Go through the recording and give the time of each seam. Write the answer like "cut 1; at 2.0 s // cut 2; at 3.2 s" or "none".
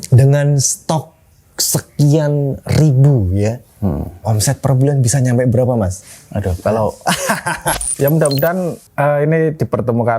cut 1; at 4.2 s // cut 2; at 7.7 s // cut 3; at 8.8 s